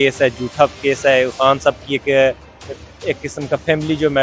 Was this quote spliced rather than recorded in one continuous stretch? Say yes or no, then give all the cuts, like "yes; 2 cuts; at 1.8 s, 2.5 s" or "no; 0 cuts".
no; 0 cuts